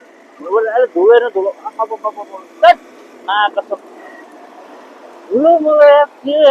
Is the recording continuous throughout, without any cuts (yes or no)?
yes